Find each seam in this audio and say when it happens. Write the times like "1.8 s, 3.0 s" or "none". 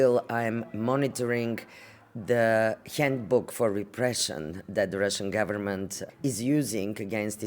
6.0 s